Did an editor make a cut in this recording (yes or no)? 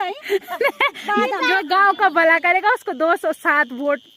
yes